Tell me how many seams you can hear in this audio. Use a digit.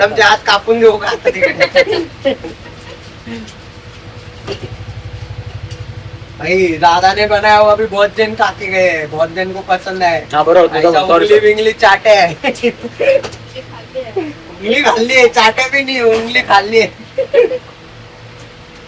0